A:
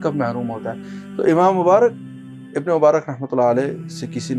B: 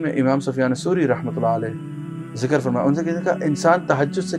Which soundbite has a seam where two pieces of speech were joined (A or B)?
A